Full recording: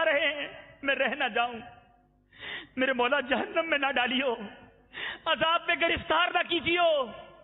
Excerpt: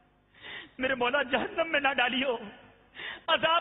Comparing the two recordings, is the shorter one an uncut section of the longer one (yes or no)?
yes